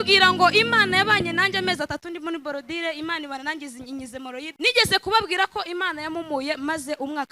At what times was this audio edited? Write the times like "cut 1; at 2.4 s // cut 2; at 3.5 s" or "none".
cut 1; at 4.5 s